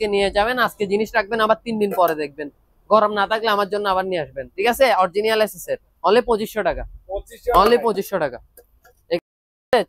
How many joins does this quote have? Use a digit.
0